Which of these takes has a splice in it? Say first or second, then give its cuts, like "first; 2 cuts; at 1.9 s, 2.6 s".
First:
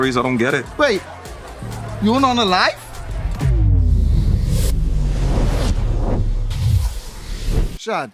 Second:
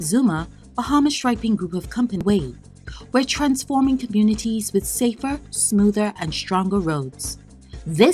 second; 1 cut; at 2.2 s